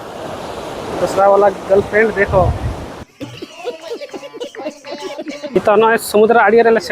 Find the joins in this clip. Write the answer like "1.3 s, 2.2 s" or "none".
3.0 s, 5.6 s